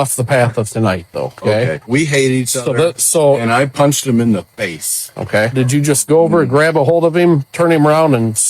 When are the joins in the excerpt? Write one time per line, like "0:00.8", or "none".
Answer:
0:01.8
0:05.5